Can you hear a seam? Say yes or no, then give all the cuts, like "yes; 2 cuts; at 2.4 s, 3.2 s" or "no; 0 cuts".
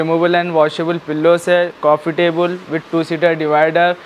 no; 0 cuts